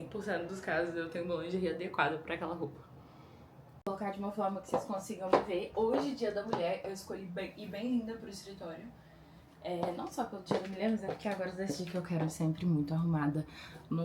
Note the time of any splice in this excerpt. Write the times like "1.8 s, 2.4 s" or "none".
3.9 s